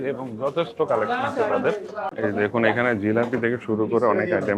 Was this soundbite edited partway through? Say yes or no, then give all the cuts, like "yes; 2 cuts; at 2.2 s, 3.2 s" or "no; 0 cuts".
yes; 1 cut; at 2.1 s